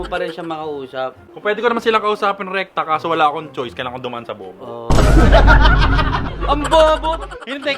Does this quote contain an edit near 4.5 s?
no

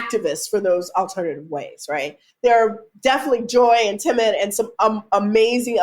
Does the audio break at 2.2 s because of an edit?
yes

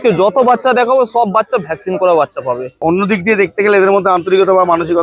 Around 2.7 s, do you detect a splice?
yes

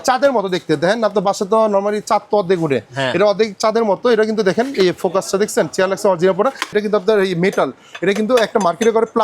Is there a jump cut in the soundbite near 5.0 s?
no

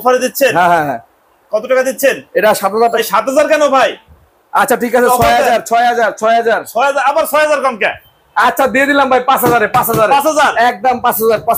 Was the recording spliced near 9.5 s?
no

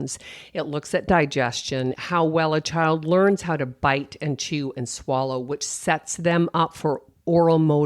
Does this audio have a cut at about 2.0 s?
yes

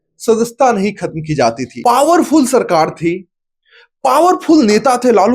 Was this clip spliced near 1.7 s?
yes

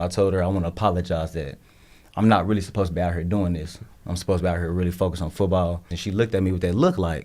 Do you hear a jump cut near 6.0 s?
yes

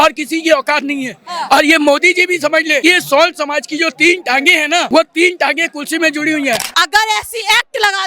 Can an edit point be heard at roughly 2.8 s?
yes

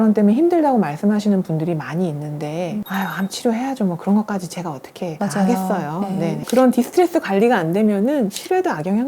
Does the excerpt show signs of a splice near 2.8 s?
yes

